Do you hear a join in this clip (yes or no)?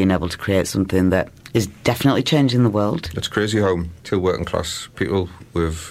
yes